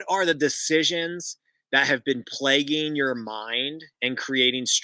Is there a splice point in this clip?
no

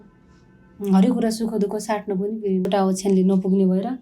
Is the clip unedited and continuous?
no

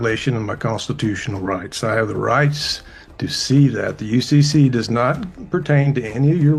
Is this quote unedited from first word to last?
yes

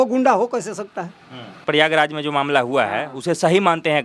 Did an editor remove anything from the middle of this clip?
yes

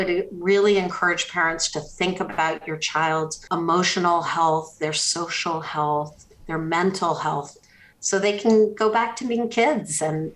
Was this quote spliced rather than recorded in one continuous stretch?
yes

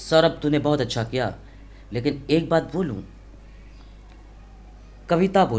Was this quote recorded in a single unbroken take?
yes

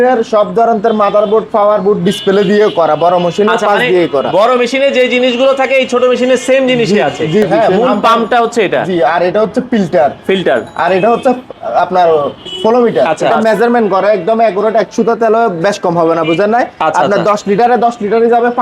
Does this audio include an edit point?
yes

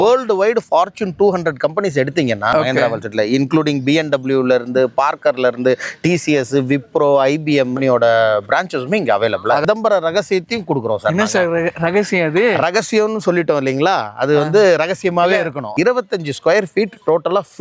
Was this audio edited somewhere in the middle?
yes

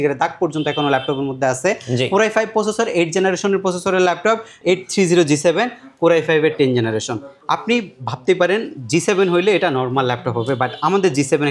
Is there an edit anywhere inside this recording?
yes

